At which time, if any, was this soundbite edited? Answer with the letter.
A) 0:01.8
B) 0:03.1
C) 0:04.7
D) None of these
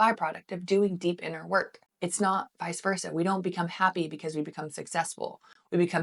A